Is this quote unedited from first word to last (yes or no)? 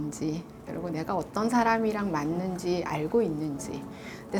yes